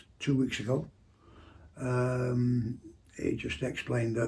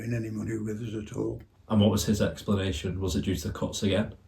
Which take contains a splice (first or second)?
second